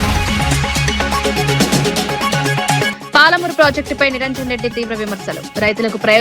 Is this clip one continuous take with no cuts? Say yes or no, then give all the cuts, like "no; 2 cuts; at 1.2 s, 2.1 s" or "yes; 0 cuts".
no; 2 cuts; at 1.1 s, 2.5 s